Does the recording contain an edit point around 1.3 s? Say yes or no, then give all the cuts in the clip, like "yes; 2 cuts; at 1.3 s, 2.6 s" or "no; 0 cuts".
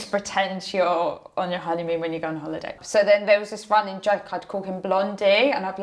no; 1 cut; at 2.7 s